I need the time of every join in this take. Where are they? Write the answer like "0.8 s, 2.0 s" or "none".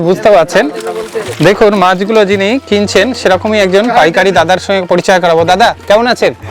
1.2 s